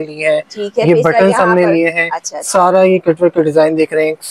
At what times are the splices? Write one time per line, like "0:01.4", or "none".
none